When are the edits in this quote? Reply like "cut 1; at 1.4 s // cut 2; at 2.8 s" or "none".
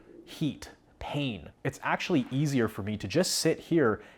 cut 1; at 1.5 s